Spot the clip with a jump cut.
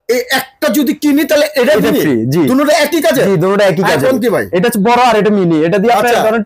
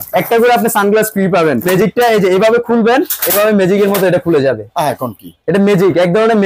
second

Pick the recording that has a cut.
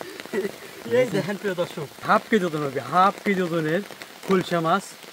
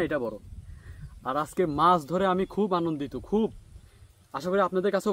first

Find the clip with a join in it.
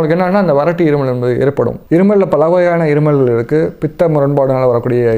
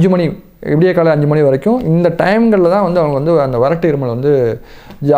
first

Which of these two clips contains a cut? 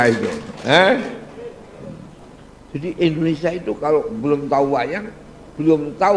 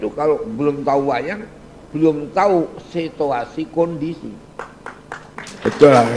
first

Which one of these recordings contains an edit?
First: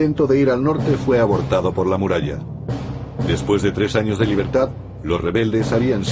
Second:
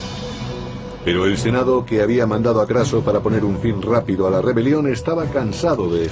second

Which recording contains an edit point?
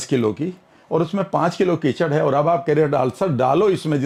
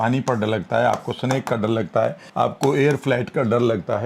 second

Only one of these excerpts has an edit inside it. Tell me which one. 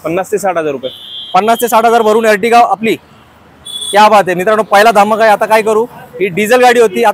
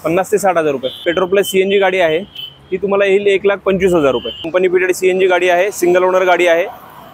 second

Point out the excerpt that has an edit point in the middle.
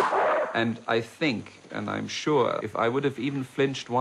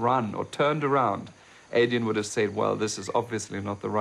second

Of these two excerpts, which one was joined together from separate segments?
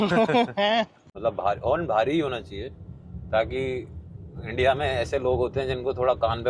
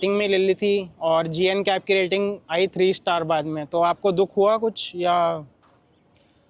first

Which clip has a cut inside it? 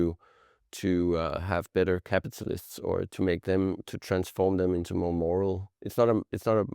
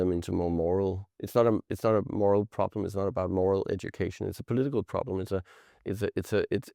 first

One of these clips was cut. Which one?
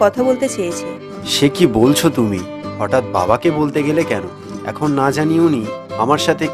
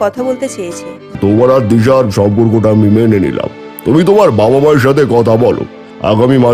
second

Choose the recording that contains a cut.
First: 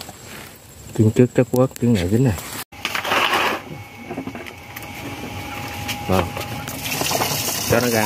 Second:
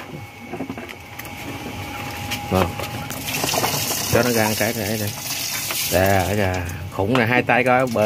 first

